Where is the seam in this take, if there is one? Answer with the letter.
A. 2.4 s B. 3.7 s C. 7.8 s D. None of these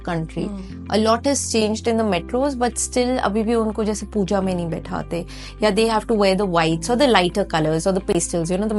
D